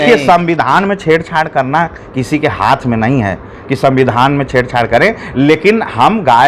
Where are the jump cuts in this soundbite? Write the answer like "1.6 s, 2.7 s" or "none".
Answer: none